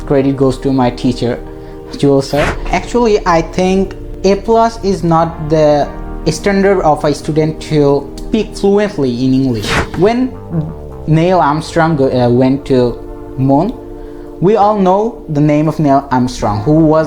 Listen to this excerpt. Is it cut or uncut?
cut